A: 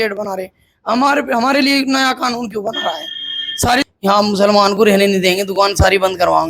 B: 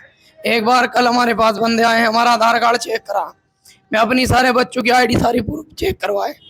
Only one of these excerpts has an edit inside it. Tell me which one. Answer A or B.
A